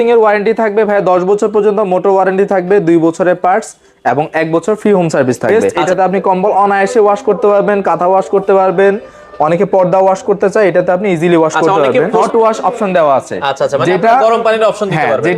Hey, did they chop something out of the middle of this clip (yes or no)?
yes